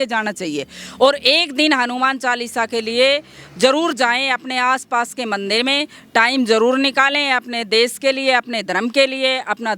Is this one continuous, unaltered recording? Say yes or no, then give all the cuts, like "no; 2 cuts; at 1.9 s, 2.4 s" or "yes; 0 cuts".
yes; 0 cuts